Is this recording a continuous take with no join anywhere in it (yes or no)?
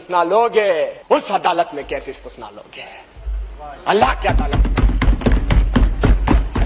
no